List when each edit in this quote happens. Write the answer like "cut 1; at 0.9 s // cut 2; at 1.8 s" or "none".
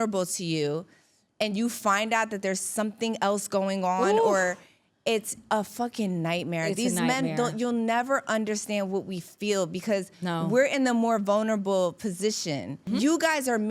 cut 1; at 12.8 s